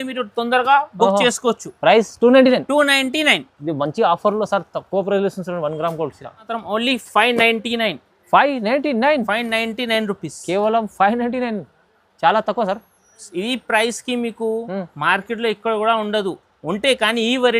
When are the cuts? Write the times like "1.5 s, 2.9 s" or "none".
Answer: 6.5 s